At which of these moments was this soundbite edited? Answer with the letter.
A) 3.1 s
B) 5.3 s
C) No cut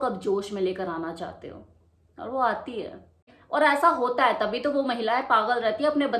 A